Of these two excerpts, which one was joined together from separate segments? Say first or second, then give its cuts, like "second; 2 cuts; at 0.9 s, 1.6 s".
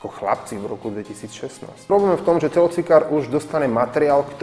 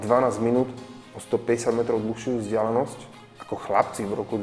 first; 1 cut; at 1.9 s